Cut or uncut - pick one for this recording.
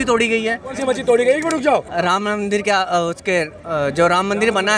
cut